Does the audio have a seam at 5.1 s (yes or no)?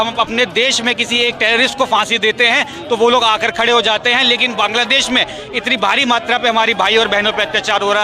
no